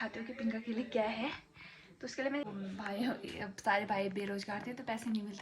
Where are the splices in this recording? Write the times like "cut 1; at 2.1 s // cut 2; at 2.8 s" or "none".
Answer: cut 1; at 2.4 s